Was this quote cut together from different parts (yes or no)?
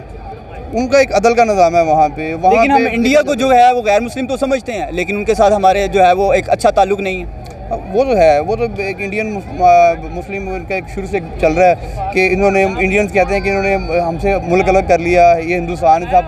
no